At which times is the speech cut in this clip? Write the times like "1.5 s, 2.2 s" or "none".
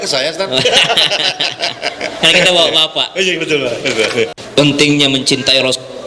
4.3 s